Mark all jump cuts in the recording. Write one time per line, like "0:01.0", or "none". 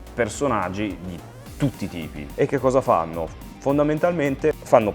0:02.2